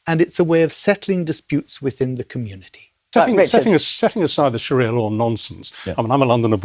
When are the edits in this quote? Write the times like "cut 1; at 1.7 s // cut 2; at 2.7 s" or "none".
cut 1; at 3.0 s